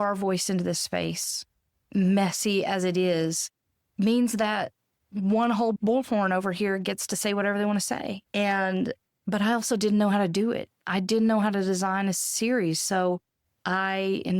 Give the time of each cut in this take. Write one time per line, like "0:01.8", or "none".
0:05.8